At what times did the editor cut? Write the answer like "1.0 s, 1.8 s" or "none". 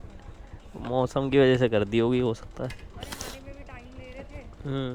none